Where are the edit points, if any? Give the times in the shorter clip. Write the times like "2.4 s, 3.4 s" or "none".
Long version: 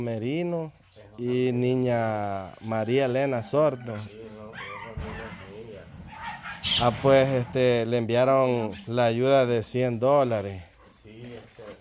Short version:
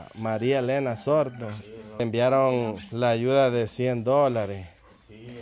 2.0 s